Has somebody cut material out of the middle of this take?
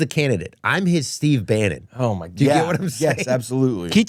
no; 0 cuts

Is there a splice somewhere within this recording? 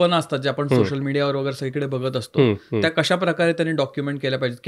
no; 0 cuts

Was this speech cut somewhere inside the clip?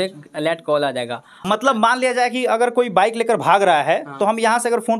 yes; 1 cut; at 1.4 s

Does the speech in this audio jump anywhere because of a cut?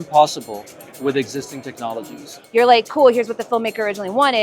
yes; 1 cut; at 2.3 s

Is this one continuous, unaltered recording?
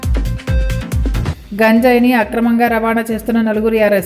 no; 1 cut; at 1.2 s

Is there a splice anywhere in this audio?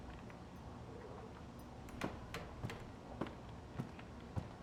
no; 0 cuts

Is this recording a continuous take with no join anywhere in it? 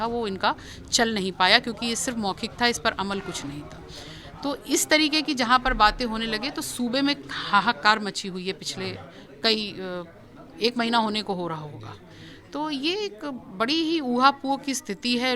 yes; 0 cuts

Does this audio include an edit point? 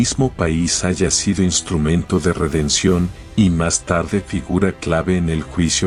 no; 0 cuts

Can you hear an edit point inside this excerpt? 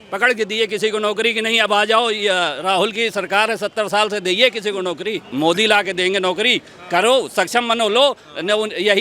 yes; 1 cut; at 5.3 s

